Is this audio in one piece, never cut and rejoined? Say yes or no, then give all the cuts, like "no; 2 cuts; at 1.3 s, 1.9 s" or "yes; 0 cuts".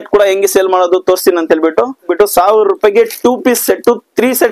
no; 1 cut; at 2.0 s